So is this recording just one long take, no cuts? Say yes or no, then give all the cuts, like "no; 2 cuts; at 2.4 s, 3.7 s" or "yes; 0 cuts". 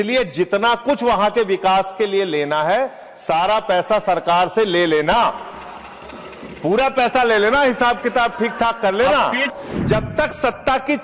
no; 1 cut; at 9.5 s